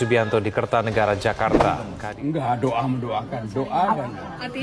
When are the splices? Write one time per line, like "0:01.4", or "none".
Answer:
0:01.9